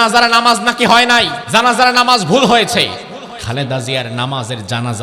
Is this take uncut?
no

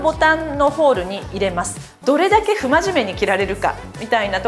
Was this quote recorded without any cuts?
no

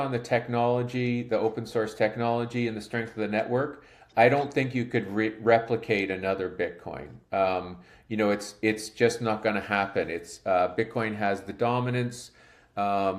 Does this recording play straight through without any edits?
yes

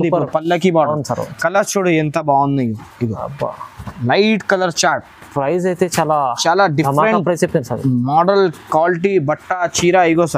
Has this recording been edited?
no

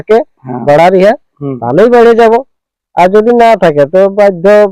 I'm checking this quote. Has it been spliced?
no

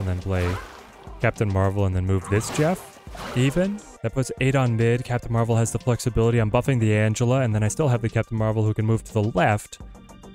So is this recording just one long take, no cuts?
no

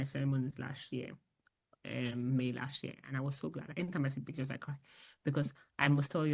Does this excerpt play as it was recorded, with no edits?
no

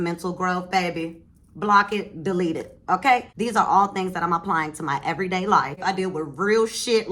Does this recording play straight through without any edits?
no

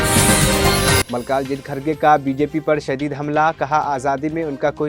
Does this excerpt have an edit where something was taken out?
no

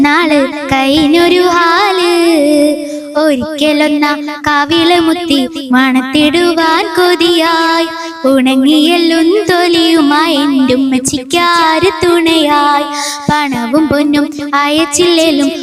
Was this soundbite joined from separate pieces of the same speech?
no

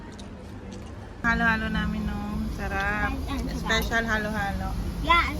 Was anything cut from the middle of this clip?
yes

